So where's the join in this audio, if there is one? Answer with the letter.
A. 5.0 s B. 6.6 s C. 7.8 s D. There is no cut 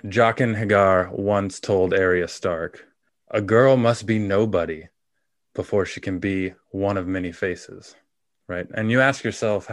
D